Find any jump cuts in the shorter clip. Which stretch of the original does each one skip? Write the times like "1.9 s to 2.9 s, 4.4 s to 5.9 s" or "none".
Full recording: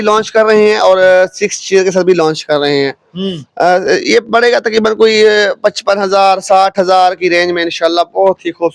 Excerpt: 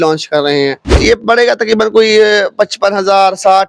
3.2 s to 4.0 s